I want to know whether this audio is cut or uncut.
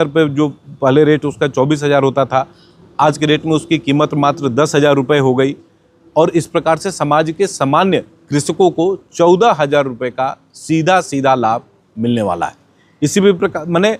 uncut